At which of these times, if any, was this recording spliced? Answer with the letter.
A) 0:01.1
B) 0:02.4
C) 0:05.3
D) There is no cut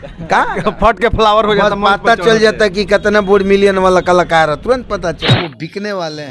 C